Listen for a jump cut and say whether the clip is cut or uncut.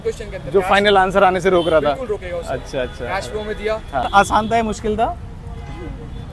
cut